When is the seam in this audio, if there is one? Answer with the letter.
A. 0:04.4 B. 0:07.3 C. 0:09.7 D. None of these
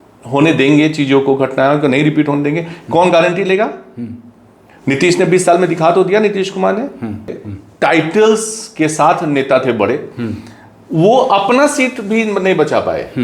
B